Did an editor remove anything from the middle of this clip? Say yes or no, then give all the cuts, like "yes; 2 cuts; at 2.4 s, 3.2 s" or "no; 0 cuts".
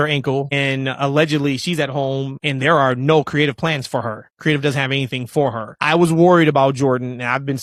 no; 0 cuts